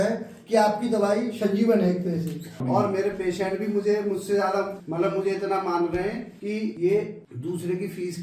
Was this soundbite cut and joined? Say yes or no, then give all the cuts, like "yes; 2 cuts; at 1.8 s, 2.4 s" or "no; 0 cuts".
yes; 4 cuts; at 2.6 s, 4.8 s, 6.6 s, 7.2 s